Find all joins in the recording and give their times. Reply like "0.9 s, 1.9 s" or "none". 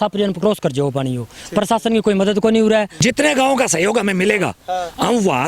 2.9 s